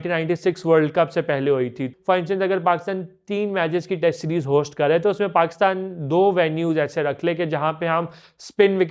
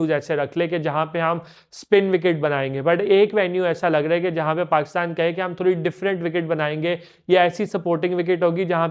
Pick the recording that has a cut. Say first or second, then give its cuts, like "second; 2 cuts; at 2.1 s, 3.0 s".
first; 1 cut; at 1.9 s